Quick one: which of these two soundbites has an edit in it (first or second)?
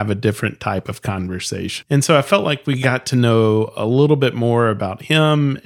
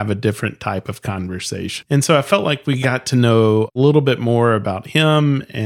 second